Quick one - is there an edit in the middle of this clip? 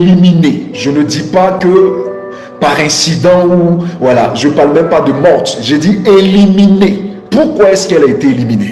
no; 0 cuts

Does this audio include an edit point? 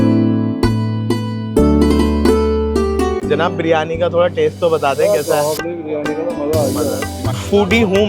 yes; 1 cut; at 3.2 s

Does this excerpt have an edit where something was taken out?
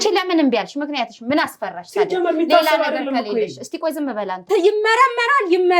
yes; 1 cut; at 4.4 s

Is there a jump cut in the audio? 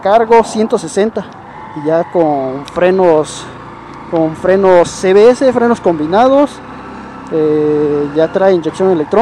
no; 0 cuts

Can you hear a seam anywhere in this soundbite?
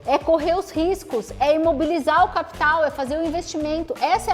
no; 0 cuts

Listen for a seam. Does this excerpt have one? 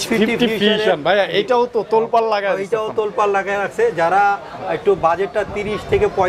no; 0 cuts

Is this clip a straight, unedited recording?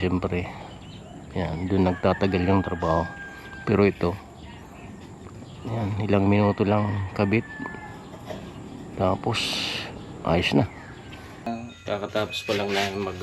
no; 1 cut; at 11.5 s

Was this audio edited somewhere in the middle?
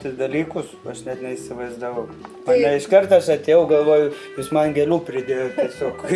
no; 0 cuts

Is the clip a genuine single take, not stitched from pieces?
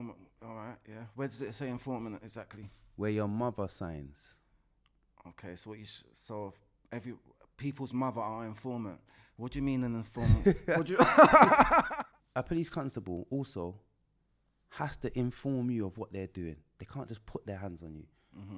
no; 1 cut; at 11.8 s

